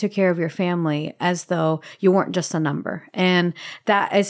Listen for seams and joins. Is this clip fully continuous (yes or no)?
yes